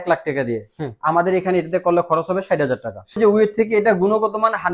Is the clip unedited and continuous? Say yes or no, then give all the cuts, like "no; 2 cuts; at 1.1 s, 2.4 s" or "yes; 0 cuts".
no; 1 cut; at 3.2 s